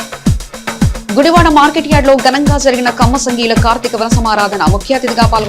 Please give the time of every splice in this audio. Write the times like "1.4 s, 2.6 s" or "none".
1.0 s

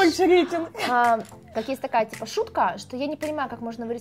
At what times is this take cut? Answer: 1.4 s

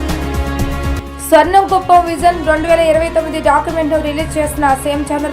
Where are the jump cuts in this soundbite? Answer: 0.9 s

